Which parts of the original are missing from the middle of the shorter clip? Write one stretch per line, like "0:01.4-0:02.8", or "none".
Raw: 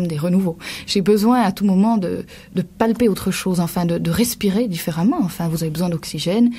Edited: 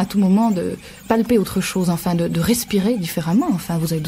0:02.4-0:02.7